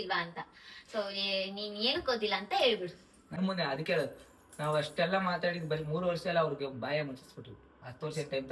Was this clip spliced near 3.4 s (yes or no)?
yes